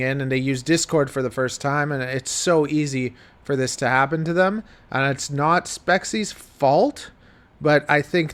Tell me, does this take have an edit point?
no; 0 cuts

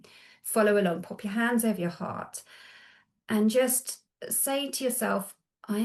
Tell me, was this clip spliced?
no; 0 cuts

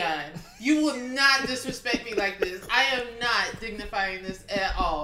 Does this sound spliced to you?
no; 0 cuts

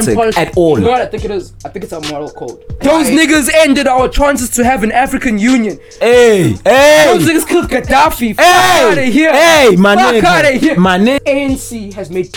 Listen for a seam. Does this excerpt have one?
yes; 2 cuts; at 2.6 s, 11.2 s

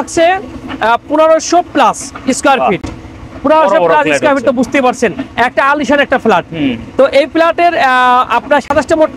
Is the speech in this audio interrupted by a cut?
no; 0 cuts

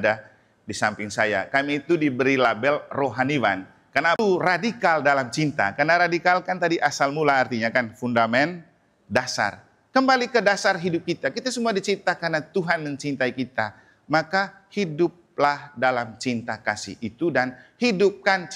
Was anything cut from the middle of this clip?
yes; 1 cut; at 4.2 s

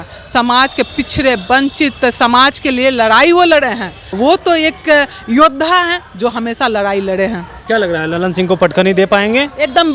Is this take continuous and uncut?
no; 2 cuts; at 4.0 s, 7.5 s

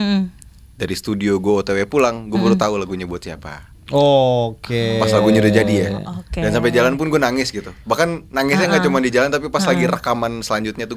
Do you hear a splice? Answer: no; 0 cuts

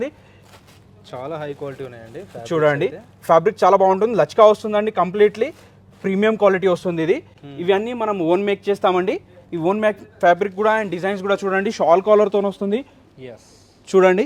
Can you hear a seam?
no; 0 cuts

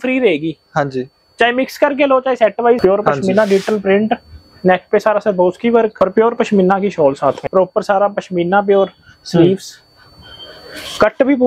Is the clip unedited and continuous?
no; 3 cuts; at 2.8 s, 5.9 s, 7.4 s

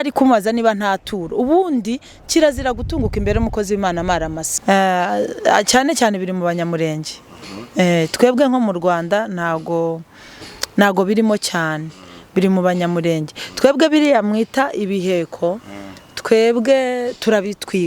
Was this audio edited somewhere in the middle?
yes; 1 cut; at 4.5 s

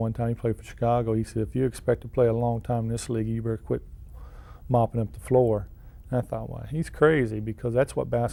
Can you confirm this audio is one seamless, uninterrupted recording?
yes; 0 cuts

